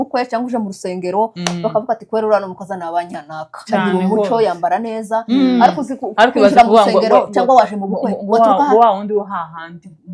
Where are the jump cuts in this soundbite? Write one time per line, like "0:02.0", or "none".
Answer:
none

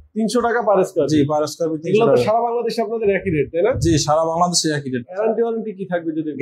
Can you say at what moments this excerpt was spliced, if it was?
0:05.2

